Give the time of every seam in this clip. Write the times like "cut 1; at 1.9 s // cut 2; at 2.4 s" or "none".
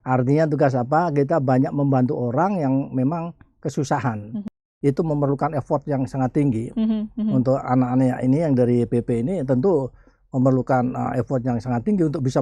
cut 1; at 4.6 s